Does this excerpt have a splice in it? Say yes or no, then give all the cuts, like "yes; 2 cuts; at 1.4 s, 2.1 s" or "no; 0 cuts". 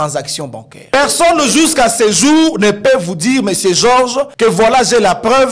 yes; 2 cuts; at 0.9 s, 4.3 s